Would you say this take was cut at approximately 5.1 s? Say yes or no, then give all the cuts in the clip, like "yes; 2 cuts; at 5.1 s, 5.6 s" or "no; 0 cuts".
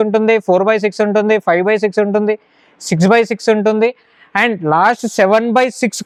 no; 0 cuts